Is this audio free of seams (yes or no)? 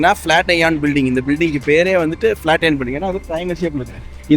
yes